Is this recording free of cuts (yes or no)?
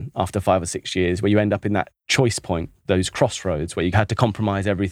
no